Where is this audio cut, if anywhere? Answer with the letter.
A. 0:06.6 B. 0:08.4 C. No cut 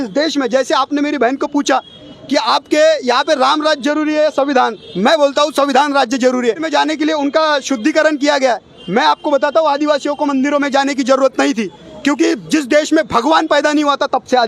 A